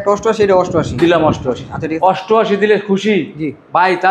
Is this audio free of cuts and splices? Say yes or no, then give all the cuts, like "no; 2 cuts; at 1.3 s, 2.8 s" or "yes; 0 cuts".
no; 1 cut; at 1.9 s